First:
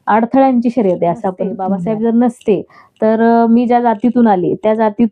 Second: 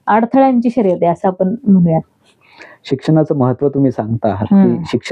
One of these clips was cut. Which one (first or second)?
first